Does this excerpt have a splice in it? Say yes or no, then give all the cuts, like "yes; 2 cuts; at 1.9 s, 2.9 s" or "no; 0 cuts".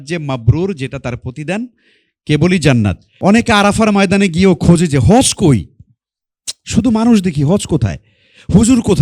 yes; 1 cut; at 3.1 s